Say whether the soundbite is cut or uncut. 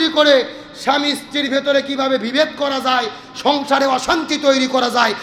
uncut